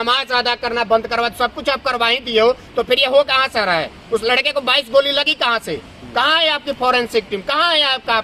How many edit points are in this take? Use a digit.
0